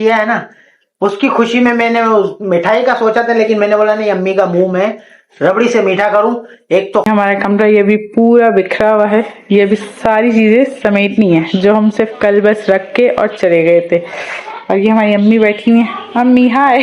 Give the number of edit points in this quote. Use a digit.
1